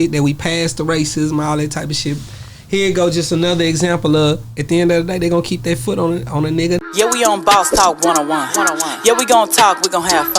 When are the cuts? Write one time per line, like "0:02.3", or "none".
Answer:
0:06.9